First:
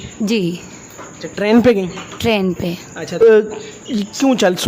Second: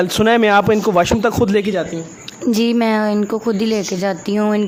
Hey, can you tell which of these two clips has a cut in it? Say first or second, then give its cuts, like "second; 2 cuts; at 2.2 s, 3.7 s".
first; 1 cut; at 3.2 s